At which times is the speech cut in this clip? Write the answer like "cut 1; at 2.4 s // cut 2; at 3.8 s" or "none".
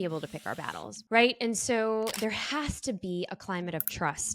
cut 1; at 1.0 s